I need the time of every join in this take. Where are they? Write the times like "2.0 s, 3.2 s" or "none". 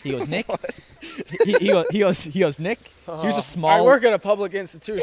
none